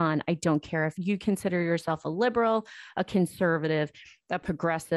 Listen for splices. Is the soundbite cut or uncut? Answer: uncut